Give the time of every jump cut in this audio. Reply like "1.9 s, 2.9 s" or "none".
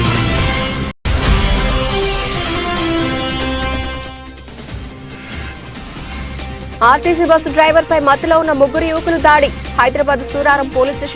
1.0 s, 6.8 s